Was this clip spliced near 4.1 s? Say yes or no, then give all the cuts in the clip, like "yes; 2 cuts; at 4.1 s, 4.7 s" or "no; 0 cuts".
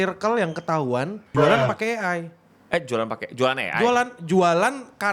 no; 1 cut; at 1.2 s